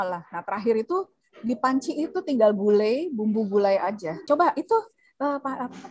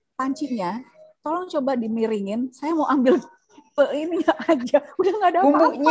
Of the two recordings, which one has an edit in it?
first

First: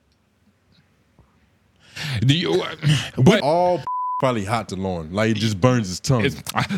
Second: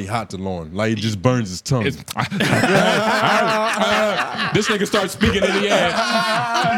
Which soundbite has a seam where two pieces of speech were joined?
first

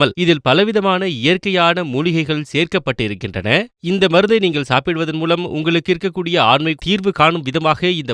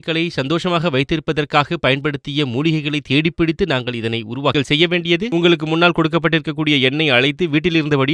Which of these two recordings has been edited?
second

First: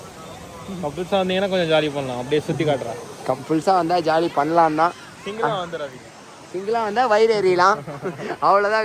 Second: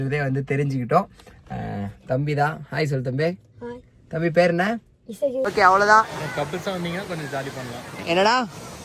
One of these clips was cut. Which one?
second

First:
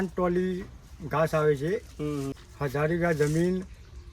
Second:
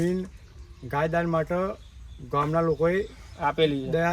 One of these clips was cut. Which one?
first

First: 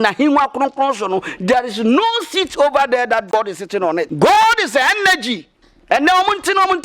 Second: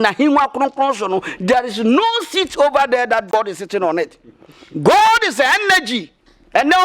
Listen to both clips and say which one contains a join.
first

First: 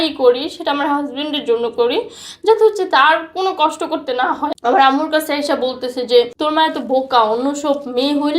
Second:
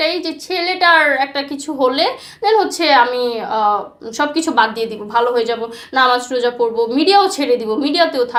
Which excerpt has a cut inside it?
first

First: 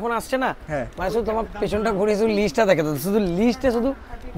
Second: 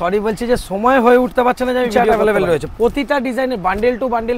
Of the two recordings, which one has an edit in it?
second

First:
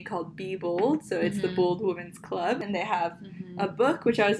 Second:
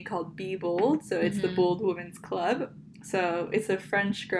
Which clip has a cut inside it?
first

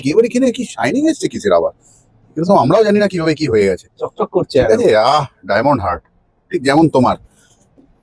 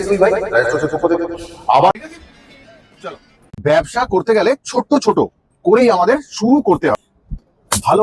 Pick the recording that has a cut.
second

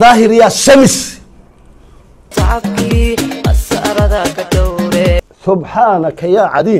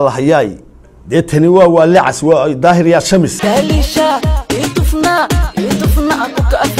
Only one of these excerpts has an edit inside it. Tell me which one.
second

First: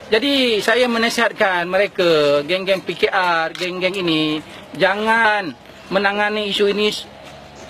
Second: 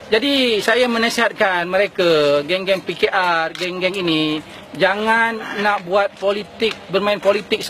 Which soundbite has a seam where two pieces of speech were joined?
second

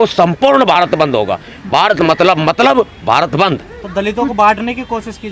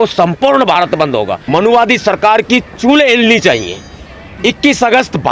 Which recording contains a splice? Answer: second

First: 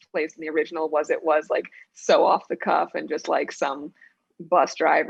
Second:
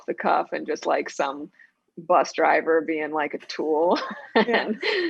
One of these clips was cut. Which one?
second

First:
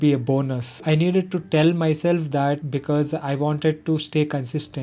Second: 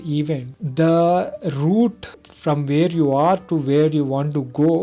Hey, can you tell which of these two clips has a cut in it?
first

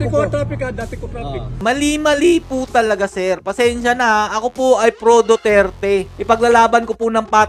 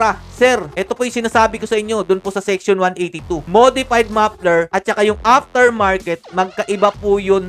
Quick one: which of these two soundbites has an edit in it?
first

